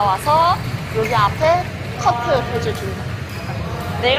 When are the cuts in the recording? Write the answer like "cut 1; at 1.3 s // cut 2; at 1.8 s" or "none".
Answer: none